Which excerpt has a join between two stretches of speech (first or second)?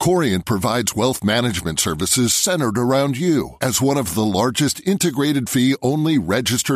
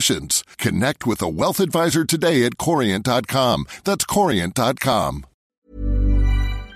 second